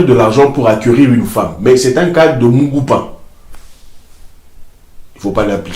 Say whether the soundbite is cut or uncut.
uncut